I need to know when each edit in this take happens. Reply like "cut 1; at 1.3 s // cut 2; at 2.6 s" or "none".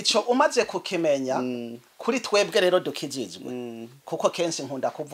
none